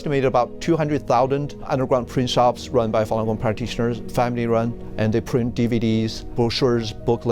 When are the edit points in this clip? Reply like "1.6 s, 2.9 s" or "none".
1.7 s, 4.8 s, 6.3 s